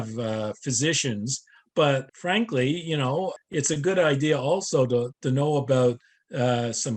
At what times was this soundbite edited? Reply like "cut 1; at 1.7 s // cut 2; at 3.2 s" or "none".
cut 1; at 2.1 s // cut 2; at 3.4 s // cut 3; at 5.1 s